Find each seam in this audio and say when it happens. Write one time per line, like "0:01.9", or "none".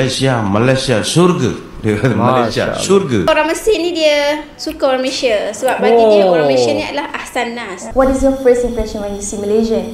0:03.3
0:07.8